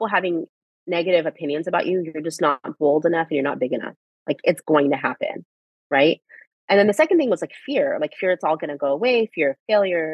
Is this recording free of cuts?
yes; 0 cuts

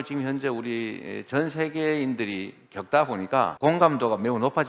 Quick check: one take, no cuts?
no; 1 cut; at 3.5 s

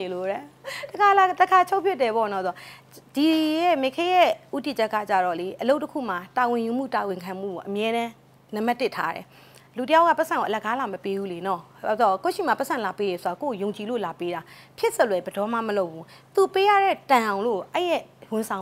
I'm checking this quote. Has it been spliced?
no; 0 cuts

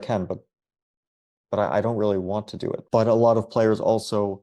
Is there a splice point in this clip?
yes; 1 cut; at 2.8 s

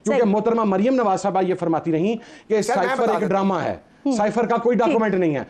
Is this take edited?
no; 0 cuts

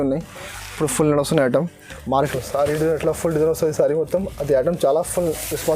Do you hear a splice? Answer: yes; 1 cut; at 2.1 s

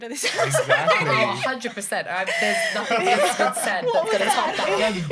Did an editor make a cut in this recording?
no; 0 cuts

